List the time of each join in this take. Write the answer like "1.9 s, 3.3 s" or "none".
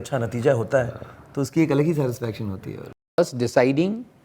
3.2 s